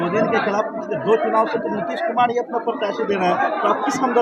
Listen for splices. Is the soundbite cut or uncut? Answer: uncut